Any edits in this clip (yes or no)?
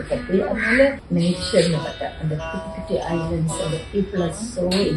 yes